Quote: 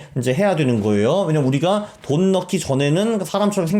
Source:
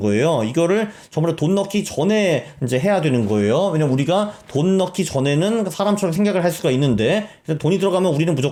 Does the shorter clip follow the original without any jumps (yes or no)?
yes